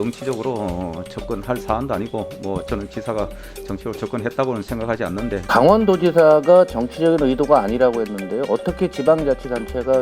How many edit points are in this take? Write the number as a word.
one